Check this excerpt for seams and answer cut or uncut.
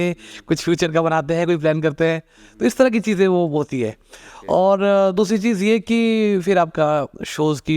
uncut